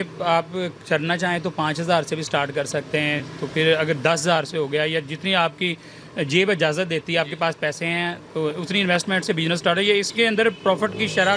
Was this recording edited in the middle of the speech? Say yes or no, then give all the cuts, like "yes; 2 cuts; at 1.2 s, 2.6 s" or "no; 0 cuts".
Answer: no; 0 cuts